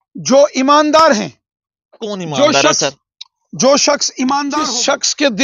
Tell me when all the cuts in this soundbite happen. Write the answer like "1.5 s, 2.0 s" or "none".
4.5 s